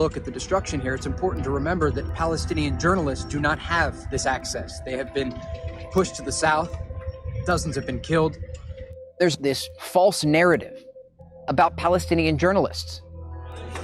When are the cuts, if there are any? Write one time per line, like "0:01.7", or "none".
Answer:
0:05.1